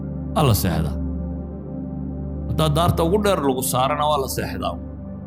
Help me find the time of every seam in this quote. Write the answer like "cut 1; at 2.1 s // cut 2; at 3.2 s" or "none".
none